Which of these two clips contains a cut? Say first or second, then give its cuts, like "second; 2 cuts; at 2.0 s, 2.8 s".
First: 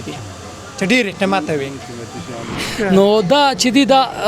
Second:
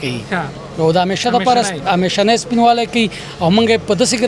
first; 1 cut; at 2.7 s